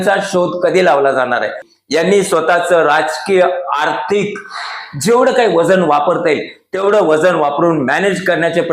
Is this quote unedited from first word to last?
no; 1 cut; at 1.7 s

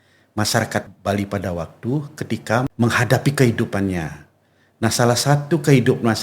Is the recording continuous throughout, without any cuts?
no; 2 cuts; at 0.8 s, 2.7 s

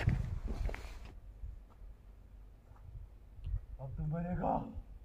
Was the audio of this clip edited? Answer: yes; 1 cut; at 1.0 s

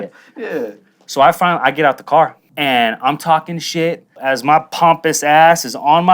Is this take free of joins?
no; 2 cuts; at 2.5 s, 4.2 s

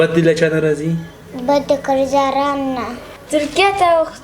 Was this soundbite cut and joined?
yes; 1 cut; at 3.2 s

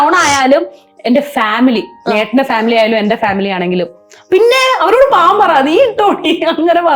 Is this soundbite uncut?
yes; 0 cuts

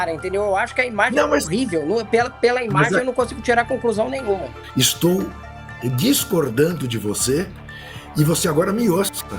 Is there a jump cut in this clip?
yes; 1 cut; at 4.2 s

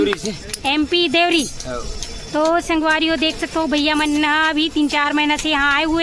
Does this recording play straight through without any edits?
yes; 0 cuts

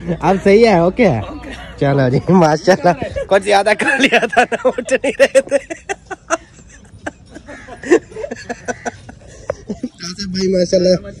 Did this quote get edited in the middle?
no; 0 cuts

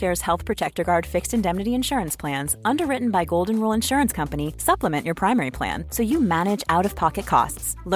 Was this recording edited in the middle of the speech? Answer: no; 0 cuts

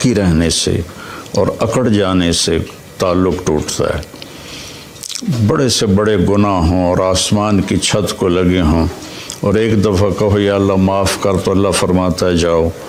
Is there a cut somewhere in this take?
no; 0 cuts

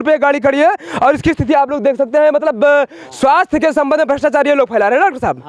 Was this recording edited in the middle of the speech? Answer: no; 0 cuts

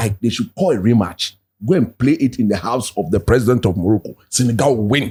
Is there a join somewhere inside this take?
no; 0 cuts

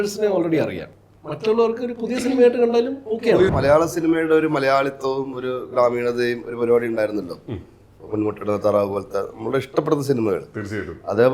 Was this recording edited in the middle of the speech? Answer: yes; 2 cuts; at 0.9 s, 3.5 s

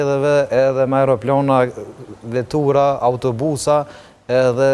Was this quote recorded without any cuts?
yes; 0 cuts

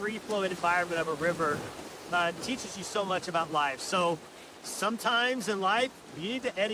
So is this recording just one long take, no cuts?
yes; 0 cuts

